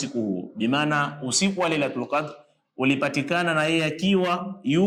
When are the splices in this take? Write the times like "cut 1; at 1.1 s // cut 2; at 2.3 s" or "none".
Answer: none